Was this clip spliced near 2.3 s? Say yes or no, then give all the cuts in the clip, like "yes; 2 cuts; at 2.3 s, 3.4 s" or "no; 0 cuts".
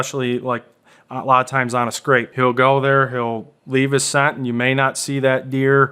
yes; 1 cut; at 2.3 s